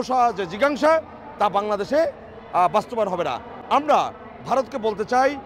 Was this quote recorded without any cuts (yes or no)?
yes